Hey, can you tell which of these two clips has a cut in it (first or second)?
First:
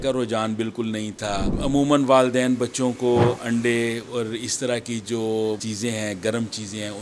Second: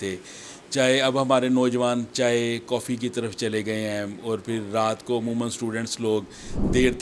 first